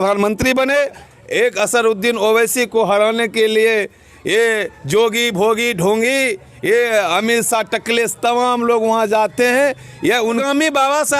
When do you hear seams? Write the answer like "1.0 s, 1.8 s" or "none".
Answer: 1.0 s, 10.4 s